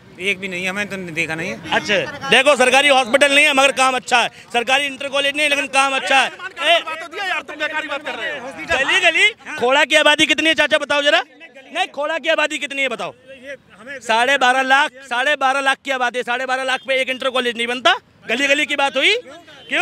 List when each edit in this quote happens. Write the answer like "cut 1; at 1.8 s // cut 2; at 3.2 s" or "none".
none